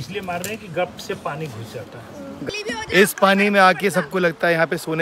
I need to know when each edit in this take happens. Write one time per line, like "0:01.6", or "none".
0:02.5